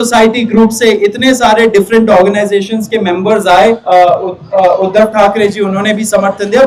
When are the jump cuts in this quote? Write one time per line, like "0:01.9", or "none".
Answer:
0:03.8